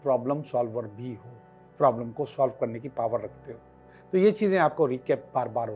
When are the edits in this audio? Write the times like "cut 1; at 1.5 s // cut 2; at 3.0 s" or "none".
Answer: none